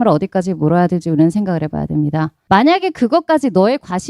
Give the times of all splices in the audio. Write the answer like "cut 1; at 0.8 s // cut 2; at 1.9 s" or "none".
cut 1; at 2.4 s